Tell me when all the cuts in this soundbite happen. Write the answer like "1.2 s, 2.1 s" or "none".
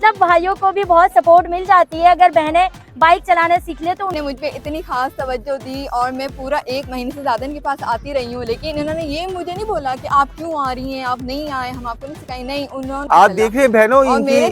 4.2 s, 13.0 s